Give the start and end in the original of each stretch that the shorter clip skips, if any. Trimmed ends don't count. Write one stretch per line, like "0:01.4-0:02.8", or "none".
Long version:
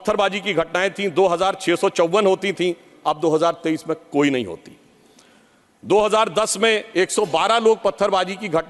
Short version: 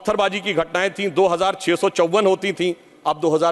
none